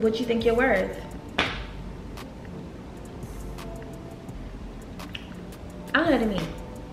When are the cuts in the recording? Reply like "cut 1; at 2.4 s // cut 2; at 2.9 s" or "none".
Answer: none